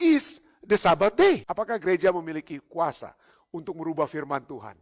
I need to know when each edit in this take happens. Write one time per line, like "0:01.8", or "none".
0:01.5